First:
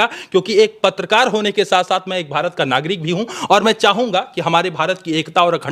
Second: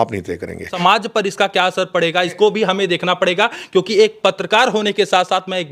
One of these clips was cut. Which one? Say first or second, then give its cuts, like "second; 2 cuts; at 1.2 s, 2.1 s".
second; 2 cuts; at 0.8 s, 2.3 s